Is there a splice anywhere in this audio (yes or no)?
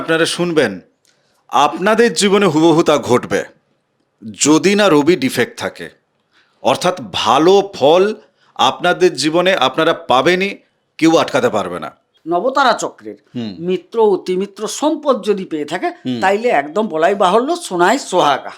yes